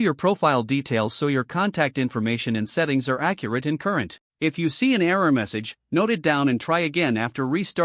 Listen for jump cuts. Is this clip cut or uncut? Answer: cut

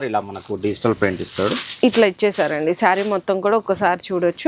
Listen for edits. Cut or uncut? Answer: uncut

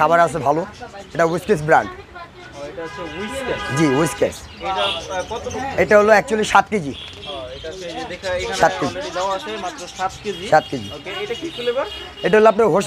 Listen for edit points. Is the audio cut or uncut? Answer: uncut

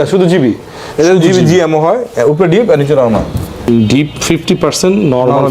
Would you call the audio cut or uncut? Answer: cut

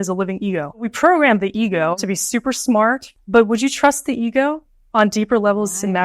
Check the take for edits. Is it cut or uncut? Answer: cut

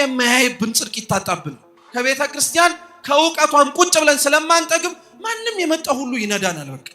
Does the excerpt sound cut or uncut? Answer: cut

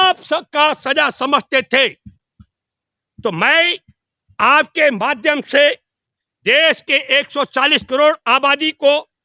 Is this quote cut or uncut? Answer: uncut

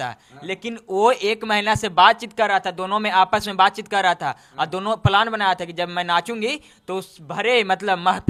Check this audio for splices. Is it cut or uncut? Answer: uncut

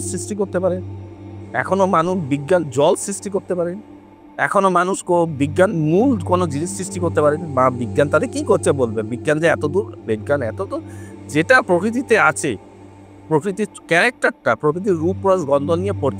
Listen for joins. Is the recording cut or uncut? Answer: uncut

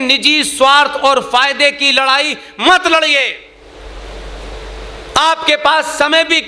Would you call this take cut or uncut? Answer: cut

